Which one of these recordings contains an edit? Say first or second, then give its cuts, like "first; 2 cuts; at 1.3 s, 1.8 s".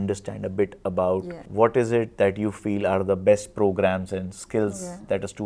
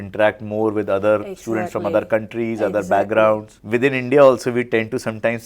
second; 1 cut; at 3.5 s